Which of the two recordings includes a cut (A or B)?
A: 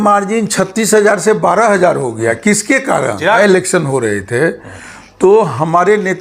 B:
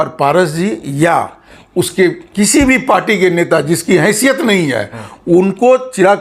A